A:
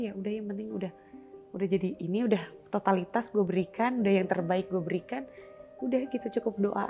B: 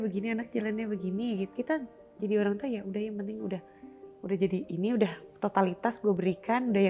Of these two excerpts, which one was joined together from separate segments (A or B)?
B